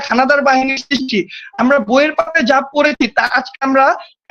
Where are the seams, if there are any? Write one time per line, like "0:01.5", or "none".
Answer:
none